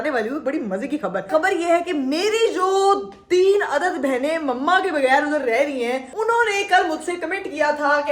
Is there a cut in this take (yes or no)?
yes